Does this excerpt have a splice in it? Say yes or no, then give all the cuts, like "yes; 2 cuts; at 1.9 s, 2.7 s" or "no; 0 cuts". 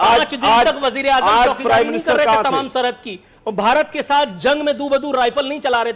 no; 0 cuts